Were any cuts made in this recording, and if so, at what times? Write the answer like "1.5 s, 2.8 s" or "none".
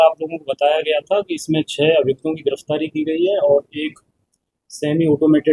none